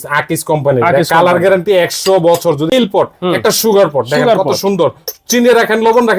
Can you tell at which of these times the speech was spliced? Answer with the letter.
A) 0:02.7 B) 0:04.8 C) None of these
A